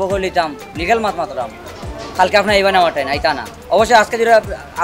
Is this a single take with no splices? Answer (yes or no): yes